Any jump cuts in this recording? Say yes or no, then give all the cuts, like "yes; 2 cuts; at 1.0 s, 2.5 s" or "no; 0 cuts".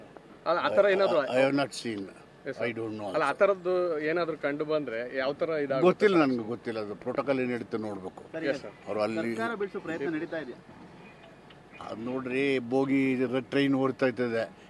no; 0 cuts